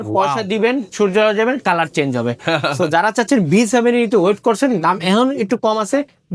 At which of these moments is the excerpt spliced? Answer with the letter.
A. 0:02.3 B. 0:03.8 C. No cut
C